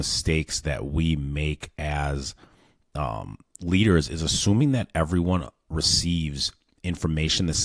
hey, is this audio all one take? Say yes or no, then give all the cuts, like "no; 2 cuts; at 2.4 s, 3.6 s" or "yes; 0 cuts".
yes; 0 cuts